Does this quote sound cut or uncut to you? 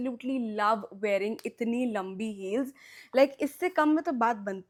uncut